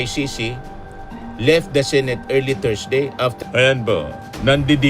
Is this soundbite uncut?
no; 1 cut; at 3.3 s

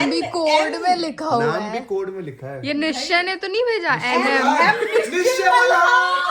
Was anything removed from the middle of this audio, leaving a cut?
no; 0 cuts

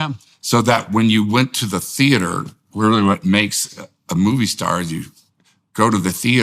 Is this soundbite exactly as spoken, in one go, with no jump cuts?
yes; 0 cuts

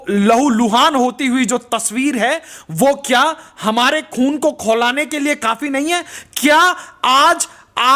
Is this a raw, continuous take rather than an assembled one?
yes; 0 cuts

